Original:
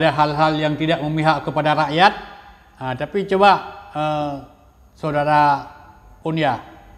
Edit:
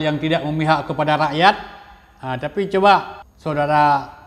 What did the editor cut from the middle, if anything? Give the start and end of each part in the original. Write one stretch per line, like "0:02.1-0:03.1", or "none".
0:03.8-0:04.8